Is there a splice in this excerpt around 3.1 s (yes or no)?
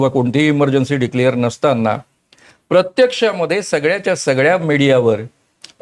no